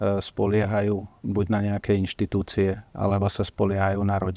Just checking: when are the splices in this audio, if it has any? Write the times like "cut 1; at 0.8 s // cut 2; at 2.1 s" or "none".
none